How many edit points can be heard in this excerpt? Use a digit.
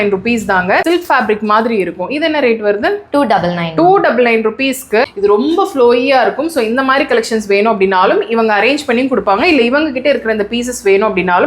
2